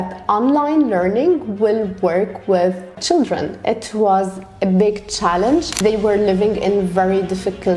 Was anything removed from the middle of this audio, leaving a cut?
yes; 2 cuts; at 2.9 s, 5.7 s

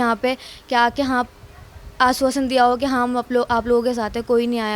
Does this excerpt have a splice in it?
no; 0 cuts

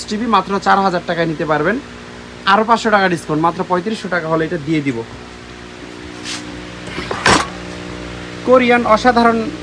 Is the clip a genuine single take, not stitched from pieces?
yes; 0 cuts

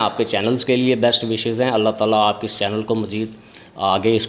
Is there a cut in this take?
no; 0 cuts

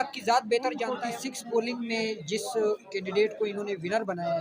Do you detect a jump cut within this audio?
yes; 1 cut; at 1.0 s

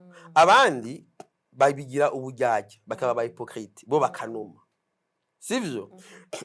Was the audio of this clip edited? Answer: no; 0 cuts

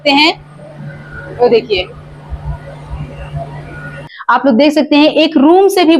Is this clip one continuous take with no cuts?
no; 1 cut; at 4.1 s

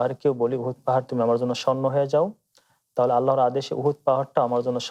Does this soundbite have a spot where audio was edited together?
no; 0 cuts

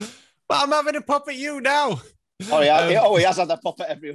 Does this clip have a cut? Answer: no; 0 cuts

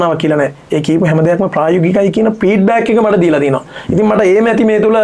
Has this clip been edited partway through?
no; 0 cuts

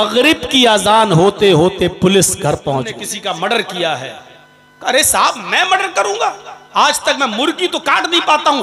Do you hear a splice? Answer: yes; 1 cut; at 3.1 s

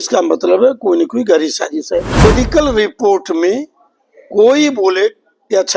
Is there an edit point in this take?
yes; 1 cut; at 2.2 s

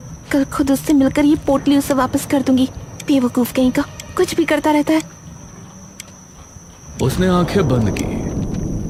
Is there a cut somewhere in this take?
no; 0 cuts

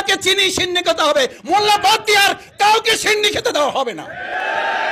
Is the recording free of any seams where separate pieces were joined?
yes; 0 cuts

